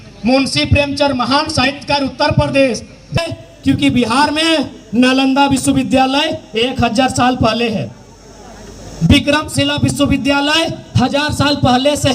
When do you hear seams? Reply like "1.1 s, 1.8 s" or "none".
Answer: 3.2 s